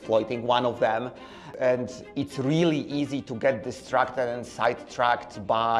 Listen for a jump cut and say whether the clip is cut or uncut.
cut